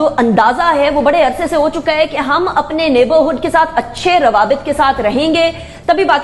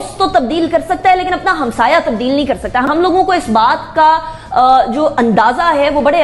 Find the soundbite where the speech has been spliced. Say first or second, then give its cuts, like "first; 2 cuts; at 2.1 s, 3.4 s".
second; 1 cut; at 2.9 s